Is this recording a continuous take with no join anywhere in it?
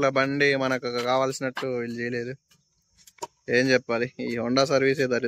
yes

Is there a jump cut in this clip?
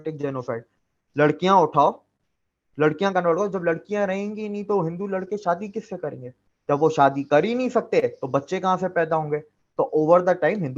no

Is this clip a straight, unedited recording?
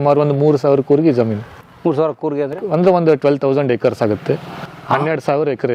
yes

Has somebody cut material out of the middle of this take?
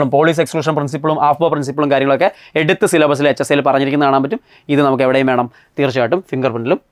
no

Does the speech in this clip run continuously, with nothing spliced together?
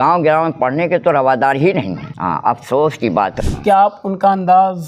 no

